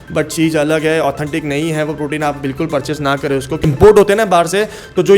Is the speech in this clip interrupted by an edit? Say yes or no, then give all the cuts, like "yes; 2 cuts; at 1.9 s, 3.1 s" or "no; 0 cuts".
yes; 1 cut; at 3.7 s